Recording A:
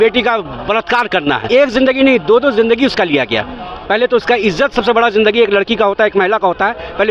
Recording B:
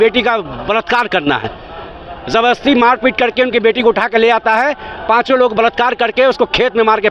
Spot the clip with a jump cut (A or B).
A